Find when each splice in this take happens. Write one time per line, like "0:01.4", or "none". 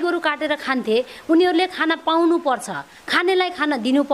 none